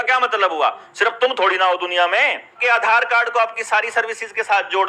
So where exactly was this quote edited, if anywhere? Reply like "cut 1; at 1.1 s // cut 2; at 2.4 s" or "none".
cut 1; at 2.6 s